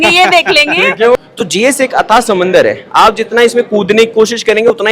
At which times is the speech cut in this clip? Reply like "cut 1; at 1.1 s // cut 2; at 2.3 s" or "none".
cut 1; at 1.2 s